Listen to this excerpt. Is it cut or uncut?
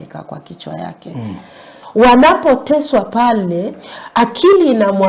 cut